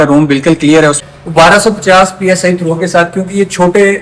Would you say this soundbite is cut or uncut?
cut